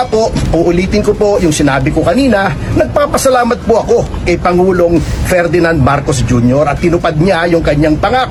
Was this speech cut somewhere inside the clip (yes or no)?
no